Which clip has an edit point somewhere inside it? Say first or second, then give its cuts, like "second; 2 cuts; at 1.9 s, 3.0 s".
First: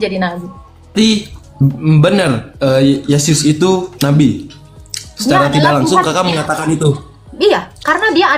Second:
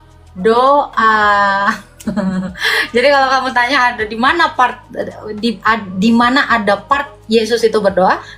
first; 1 cut; at 0.9 s